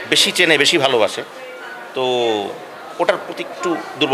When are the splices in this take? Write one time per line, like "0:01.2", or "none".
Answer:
none